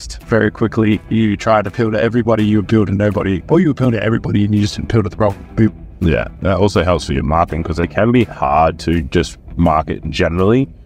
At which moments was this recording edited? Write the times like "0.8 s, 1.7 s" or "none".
1.0 s, 3.4 s, 6.3 s, 7.9 s